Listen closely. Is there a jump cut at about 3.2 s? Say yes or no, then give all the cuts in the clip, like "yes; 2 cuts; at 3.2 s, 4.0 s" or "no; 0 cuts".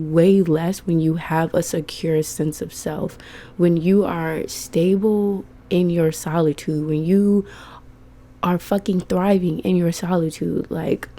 no; 0 cuts